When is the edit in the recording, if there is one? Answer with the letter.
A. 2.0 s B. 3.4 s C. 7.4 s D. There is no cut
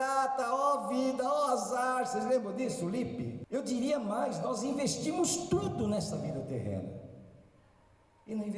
B